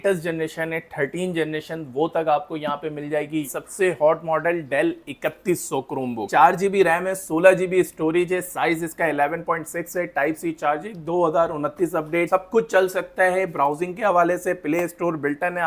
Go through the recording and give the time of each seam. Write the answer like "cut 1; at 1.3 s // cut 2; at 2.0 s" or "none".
cut 1; at 3.5 s // cut 2; at 6.3 s // cut 3; at 12.3 s